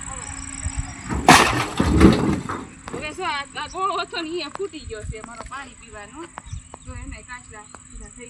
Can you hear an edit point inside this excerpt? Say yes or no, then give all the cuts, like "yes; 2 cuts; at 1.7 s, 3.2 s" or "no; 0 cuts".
no; 0 cuts